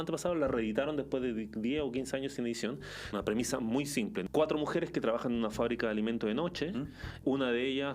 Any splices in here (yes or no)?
yes